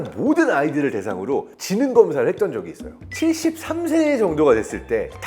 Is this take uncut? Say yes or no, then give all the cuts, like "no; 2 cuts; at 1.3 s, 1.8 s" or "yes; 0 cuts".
no; 1 cut; at 3.0 s